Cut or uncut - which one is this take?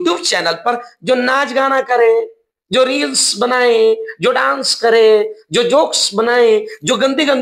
uncut